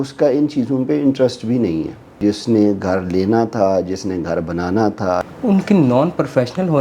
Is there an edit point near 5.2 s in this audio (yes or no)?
yes